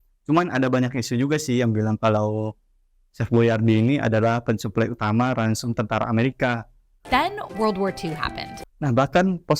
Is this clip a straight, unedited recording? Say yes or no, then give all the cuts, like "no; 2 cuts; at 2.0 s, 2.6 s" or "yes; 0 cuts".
no; 1 cut; at 8.7 s